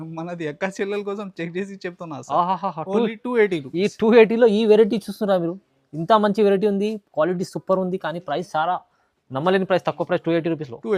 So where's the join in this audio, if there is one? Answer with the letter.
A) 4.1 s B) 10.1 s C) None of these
C